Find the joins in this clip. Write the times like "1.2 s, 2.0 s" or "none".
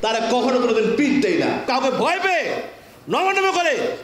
1.7 s